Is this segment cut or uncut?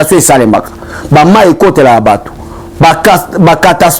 uncut